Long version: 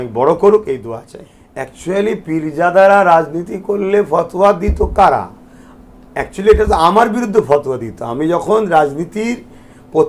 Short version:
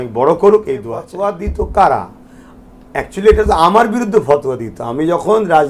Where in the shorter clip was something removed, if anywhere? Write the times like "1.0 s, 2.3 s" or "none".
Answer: 1.1 s

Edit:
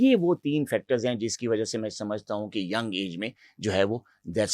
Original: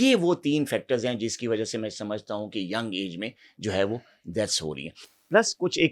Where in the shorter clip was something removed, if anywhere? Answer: none

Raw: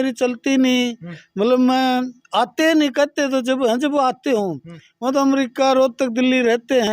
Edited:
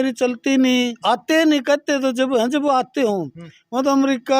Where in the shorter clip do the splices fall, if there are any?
1.0 s

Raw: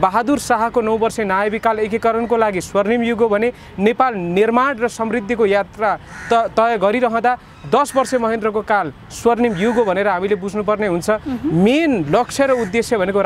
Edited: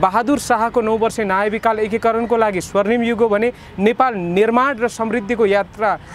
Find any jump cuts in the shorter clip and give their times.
none

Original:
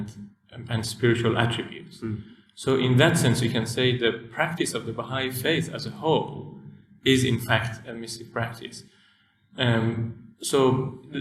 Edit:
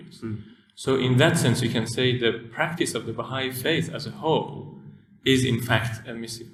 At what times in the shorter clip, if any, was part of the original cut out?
none

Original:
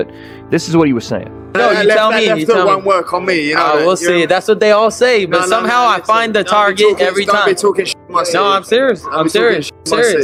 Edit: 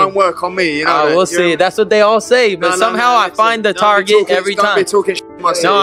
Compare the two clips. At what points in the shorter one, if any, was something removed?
none

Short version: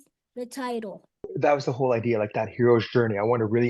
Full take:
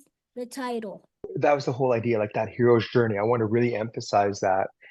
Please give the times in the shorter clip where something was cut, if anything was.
none

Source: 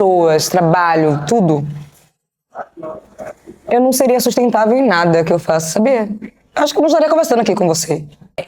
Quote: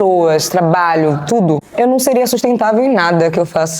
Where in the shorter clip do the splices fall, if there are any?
1.7 s

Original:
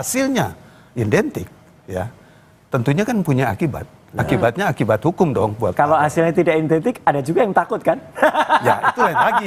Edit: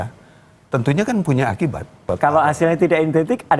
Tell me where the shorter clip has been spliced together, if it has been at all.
2.0 s

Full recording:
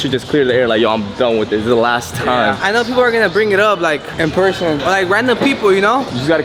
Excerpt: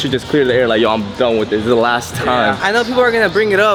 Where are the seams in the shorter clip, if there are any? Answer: none

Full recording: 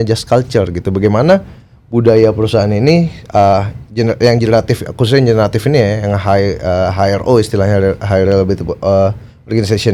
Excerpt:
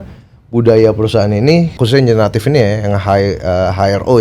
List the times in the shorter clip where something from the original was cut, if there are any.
1.8 s

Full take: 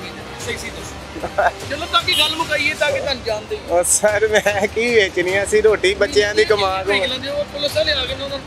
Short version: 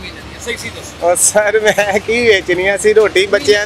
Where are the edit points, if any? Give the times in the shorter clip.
0.9 s

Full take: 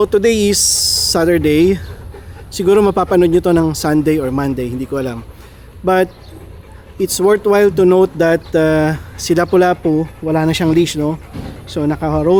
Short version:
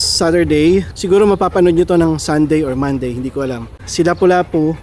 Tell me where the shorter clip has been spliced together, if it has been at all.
0.9 s, 3.8 s

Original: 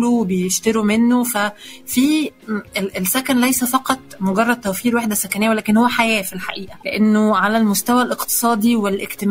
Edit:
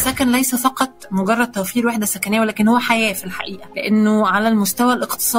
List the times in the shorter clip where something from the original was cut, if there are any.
none

